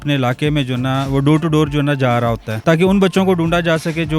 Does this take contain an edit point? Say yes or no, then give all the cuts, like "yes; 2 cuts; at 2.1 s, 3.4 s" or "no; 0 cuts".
yes; 1 cut; at 2.5 s